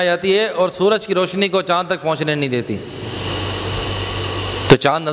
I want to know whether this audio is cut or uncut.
uncut